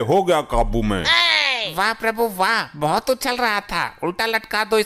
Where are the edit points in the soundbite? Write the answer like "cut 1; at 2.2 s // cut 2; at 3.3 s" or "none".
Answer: none